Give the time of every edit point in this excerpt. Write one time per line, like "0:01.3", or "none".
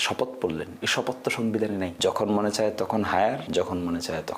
0:01.9
0:03.4